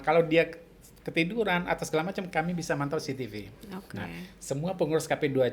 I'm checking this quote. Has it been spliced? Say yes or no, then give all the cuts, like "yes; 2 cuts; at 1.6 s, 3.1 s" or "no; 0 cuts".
no; 0 cuts